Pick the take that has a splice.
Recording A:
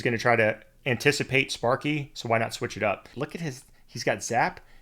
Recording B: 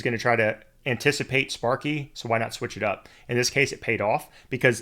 A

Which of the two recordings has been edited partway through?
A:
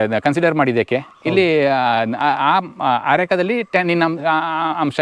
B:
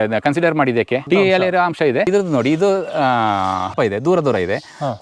B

